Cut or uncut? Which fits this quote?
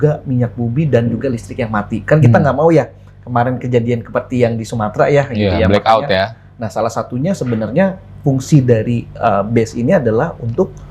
uncut